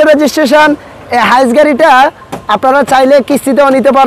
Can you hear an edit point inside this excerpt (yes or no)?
no